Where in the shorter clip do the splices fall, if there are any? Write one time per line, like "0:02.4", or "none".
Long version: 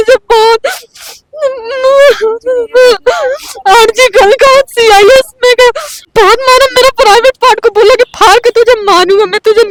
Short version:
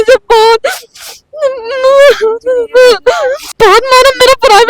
0:03.4

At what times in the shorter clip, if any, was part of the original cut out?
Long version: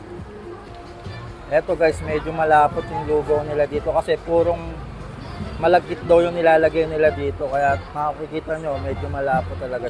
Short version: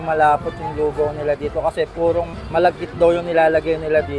0:02.4

